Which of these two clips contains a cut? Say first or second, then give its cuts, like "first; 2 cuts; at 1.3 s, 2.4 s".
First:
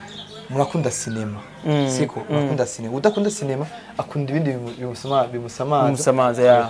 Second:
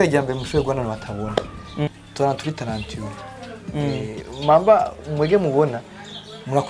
second; 1 cut; at 1.8 s